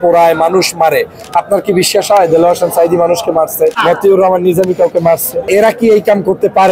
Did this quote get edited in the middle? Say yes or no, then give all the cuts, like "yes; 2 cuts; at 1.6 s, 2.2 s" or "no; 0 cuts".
yes; 2 cuts; at 3.8 s, 5.5 s